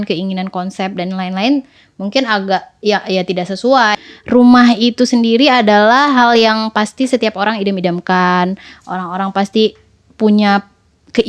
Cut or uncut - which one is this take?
cut